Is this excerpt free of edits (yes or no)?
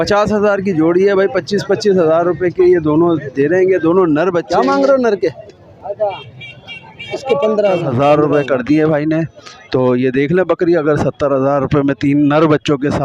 no